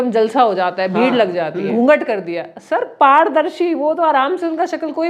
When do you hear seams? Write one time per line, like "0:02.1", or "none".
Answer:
0:01.7